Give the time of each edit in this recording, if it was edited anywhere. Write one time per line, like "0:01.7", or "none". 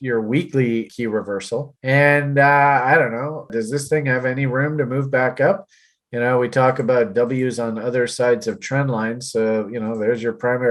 0:00.9
0:03.5